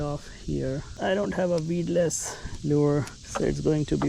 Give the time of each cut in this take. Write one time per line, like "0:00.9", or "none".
0:00.9
0:03.2

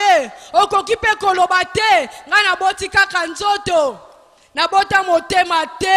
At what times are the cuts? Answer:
none

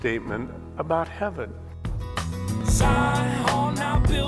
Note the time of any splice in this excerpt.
0:02.2

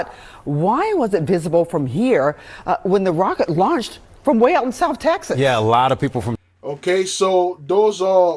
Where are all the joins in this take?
none

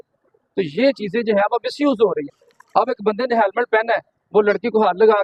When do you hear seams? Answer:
none

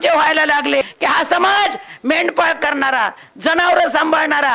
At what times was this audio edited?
0:00.9

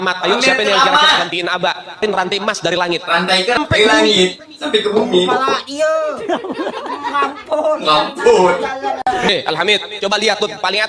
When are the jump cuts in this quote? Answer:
0:02.0
0:03.6
0:09.3

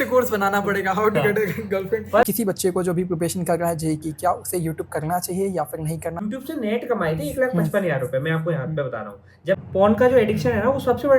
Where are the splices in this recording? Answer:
0:02.2
0:06.2
0:09.6

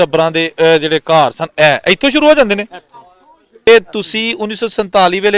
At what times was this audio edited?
0:03.7

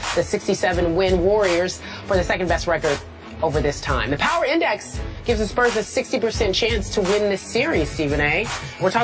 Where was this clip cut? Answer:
0:01.5

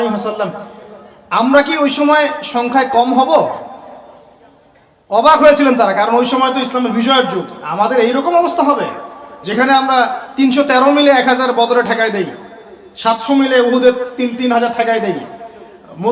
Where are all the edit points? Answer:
none

